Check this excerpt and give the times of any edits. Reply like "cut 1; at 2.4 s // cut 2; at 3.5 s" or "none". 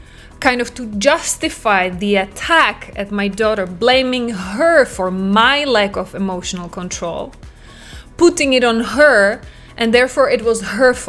none